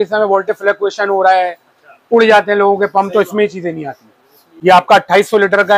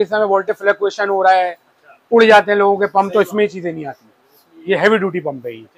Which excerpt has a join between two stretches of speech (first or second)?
first